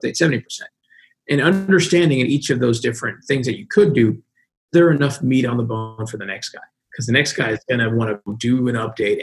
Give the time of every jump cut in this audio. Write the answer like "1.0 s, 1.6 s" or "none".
8.3 s